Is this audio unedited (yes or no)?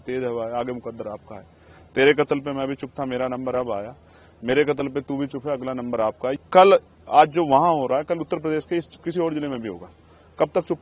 no